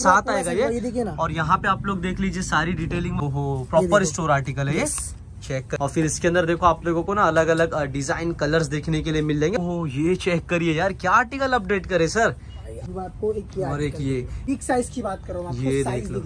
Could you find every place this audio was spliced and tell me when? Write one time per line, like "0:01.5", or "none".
0:03.3
0:05.8
0:09.6
0:12.8
0:14.4